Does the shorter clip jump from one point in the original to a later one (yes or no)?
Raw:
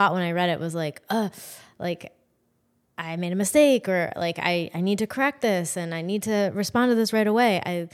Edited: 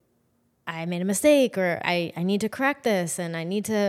yes